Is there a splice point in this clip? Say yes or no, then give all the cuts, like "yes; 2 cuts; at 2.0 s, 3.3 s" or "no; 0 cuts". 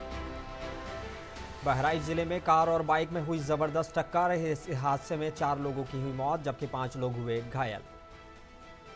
no; 0 cuts